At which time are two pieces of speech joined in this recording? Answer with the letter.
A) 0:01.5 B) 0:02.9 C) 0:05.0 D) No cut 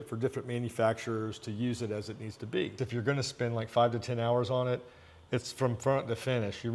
B